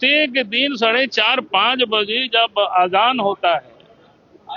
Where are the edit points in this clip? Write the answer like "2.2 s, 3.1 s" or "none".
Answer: none